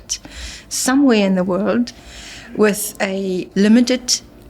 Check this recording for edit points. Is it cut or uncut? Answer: cut